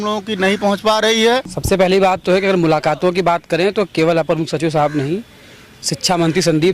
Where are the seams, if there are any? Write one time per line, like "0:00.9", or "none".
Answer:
0:01.5